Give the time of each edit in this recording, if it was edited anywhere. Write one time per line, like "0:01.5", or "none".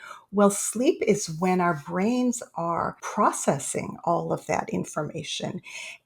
0:03.0